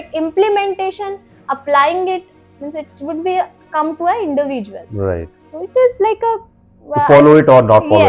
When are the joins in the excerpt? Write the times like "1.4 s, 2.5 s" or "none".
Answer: none